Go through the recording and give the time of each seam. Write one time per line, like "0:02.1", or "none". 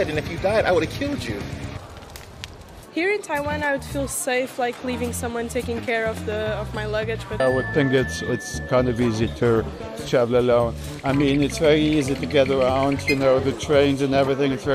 0:02.8
0:07.4